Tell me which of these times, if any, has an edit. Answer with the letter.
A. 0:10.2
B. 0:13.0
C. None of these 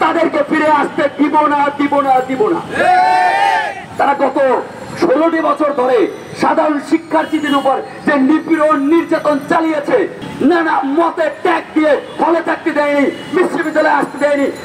A